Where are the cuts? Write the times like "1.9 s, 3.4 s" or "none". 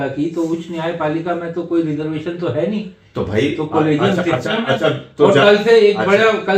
none

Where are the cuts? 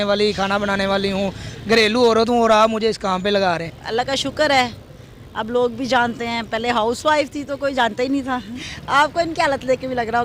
3.7 s, 8.5 s

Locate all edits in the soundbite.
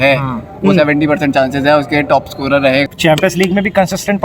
2.8 s

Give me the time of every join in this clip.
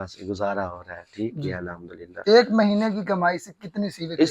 2.1 s

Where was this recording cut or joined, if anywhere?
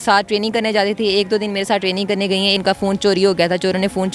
2.6 s

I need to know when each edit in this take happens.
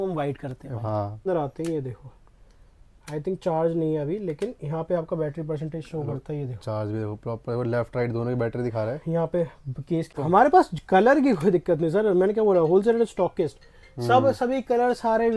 1.3 s, 10.1 s

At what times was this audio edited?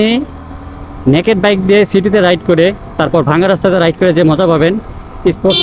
none

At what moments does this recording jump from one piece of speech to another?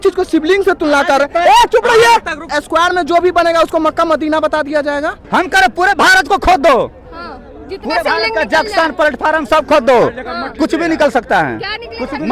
2.6 s, 5.2 s

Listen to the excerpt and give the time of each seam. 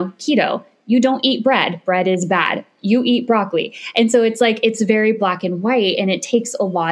none

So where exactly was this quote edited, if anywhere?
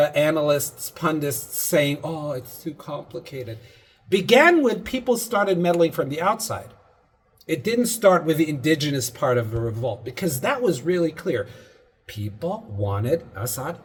none

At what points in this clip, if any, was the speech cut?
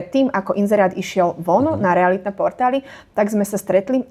none

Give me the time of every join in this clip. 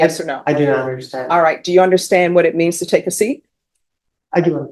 none

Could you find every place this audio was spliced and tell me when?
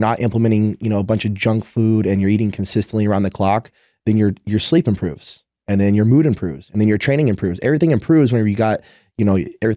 none

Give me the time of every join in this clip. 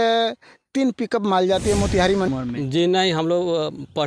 2.3 s

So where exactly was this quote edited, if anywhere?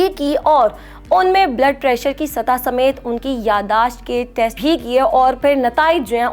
4.6 s

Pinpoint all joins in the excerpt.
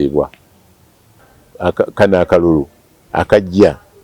1.1 s

